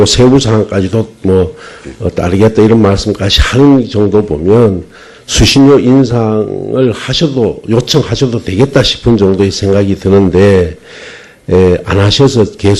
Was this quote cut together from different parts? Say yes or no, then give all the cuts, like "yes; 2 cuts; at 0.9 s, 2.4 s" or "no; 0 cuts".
yes; 1 cut; at 4.6 s